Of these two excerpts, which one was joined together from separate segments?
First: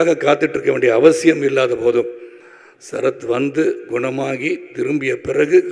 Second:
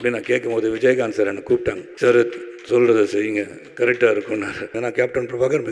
second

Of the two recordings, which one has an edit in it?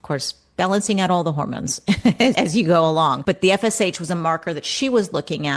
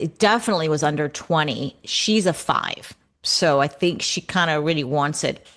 first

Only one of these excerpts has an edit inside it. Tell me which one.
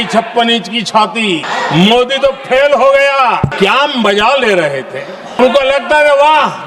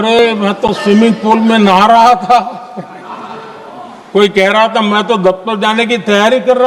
first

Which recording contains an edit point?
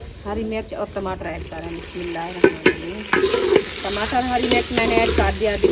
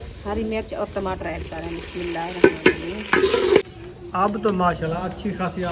second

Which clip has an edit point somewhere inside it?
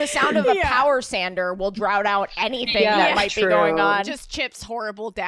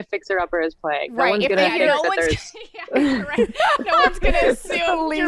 first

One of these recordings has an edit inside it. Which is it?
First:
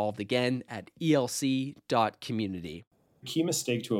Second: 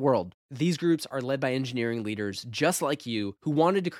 first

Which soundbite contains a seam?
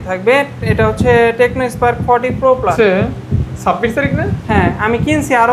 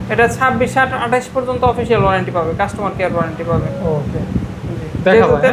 first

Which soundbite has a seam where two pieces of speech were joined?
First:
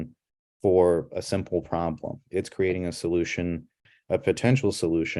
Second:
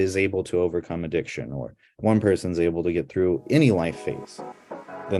first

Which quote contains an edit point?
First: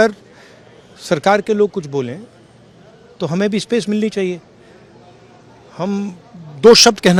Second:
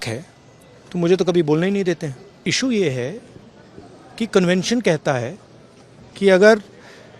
second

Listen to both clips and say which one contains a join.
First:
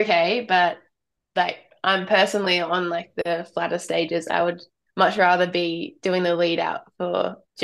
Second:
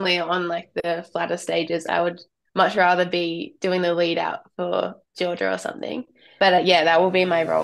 second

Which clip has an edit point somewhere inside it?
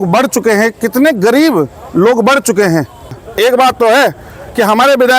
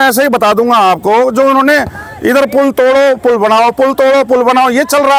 first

